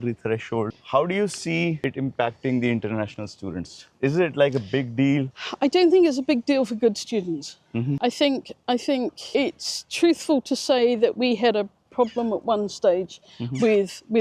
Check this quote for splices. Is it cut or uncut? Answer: uncut